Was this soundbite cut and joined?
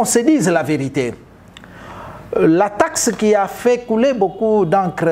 no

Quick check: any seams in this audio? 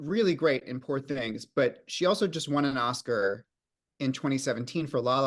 no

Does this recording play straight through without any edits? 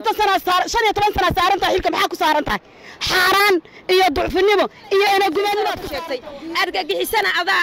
no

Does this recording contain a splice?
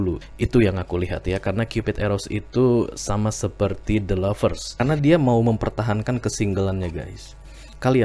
yes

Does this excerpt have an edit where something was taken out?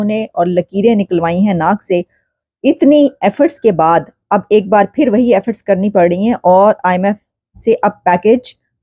no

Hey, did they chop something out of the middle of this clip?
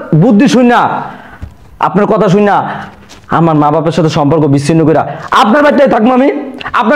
no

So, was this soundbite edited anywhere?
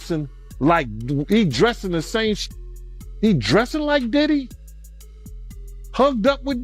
yes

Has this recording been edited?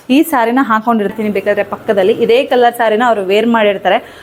yes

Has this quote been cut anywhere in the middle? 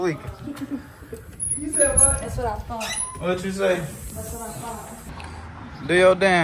no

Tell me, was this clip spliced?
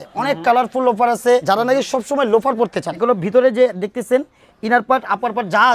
yes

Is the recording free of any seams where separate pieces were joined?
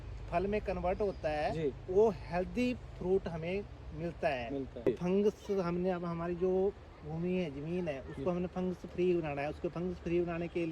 no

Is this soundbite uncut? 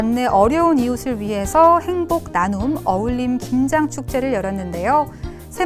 yes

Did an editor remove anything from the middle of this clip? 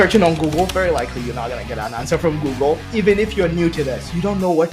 yes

